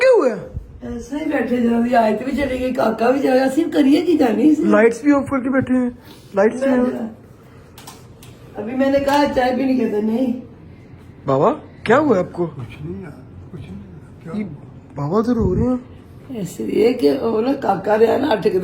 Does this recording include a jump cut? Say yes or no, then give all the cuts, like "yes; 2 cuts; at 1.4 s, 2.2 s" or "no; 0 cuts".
no; 0 cuts